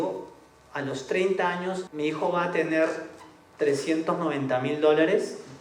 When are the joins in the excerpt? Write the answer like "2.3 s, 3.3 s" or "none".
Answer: 1.9 s

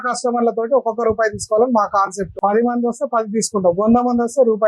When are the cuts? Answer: 2.3 s

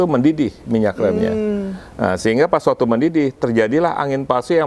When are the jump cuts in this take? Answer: none

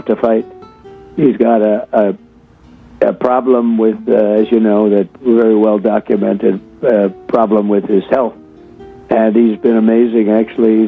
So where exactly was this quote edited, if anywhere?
none

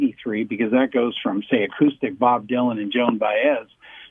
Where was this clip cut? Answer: none

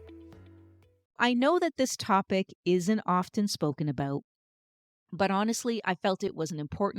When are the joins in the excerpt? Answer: 1.2 s

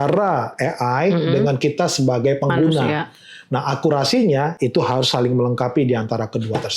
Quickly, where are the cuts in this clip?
none

